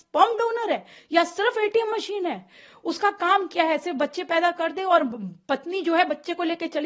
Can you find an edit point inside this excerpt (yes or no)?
no